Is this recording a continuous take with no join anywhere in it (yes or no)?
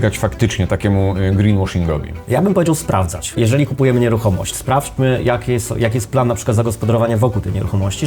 no